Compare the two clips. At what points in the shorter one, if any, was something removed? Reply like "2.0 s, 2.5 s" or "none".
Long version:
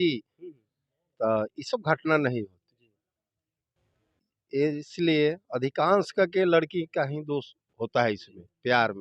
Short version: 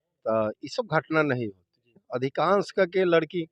2.0 s